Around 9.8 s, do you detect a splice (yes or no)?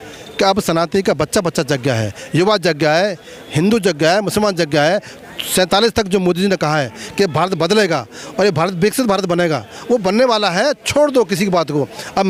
no